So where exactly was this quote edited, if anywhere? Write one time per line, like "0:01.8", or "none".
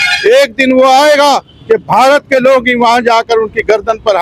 none